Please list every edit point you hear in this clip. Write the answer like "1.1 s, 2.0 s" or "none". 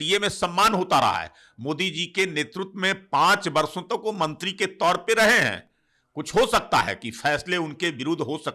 none